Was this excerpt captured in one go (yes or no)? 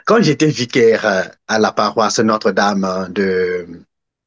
yes